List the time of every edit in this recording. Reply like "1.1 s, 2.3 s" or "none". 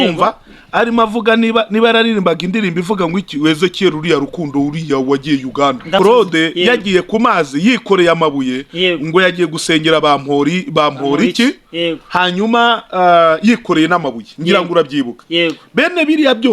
6.0 s